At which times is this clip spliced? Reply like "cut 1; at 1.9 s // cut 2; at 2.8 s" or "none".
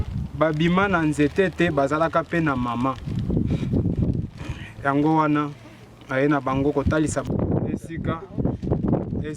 cut 1; at 7.2 s

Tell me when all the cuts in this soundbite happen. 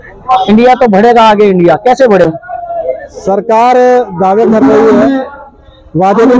cut 1; at 2.2 s

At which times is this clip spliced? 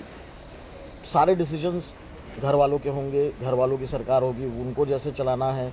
none

